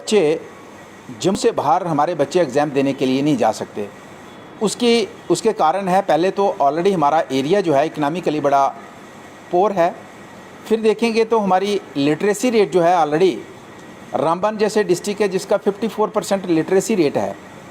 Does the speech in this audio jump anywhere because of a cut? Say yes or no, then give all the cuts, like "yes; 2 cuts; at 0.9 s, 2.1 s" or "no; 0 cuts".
yes; 1 cut; at 1.4 s